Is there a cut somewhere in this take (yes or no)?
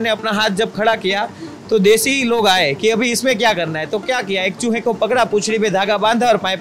no